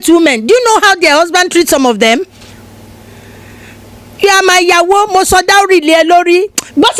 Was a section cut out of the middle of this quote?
no; 0 cuts

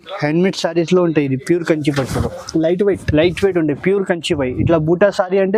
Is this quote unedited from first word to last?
yes; 0 cuts

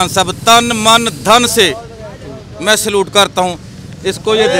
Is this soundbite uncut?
yes; 0 cuts

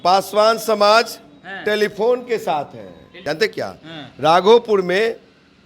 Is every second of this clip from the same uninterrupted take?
no; 1 cut; at 3.1 s

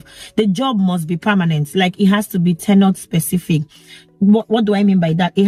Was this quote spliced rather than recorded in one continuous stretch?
no; 0 cuts

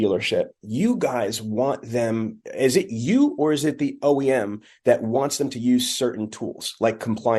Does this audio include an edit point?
no; 0 cuts

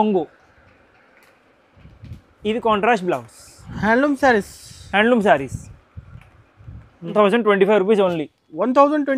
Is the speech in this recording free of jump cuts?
no; 1 cut; at 7.1 s

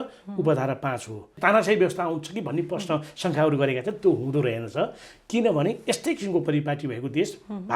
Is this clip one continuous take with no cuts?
no; 1 cut; at 1.3 s

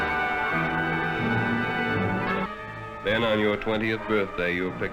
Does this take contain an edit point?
yes; 1 cut; at 2.5 s

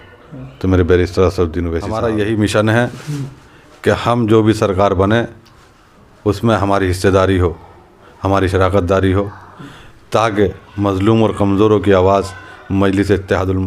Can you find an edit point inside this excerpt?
yes; 1 cut; at 1.8 s

